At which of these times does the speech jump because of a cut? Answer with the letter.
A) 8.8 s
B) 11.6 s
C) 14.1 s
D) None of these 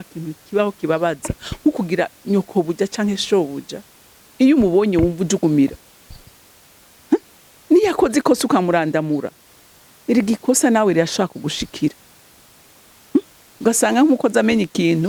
D